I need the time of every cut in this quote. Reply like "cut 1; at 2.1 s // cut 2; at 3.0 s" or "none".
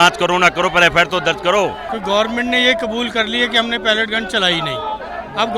cut 1; at 1.9 s